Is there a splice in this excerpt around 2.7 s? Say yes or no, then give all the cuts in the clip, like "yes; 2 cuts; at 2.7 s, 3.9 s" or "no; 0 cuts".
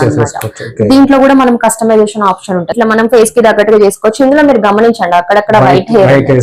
yes; 1 cut; at 2.7 s